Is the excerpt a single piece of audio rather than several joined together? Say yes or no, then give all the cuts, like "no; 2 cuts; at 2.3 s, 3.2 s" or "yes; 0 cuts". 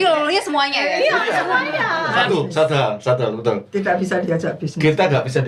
no; 1 cut; at 2.1 s